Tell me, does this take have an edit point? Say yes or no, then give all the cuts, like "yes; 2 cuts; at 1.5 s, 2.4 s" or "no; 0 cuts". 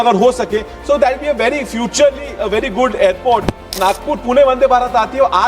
yes; 1 cut; at 3.7 s